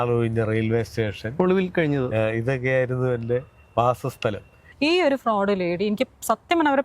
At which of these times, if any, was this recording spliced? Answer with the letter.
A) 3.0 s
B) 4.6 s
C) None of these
B